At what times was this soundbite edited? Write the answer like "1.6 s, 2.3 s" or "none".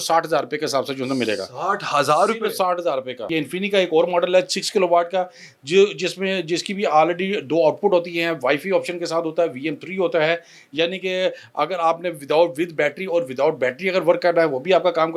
3.3 s